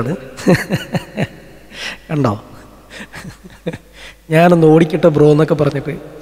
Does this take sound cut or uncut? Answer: uncut